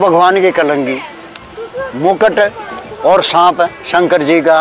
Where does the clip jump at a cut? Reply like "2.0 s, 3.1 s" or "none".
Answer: 1.4 s